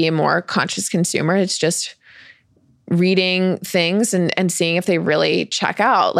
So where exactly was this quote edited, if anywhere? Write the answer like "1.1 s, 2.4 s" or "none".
none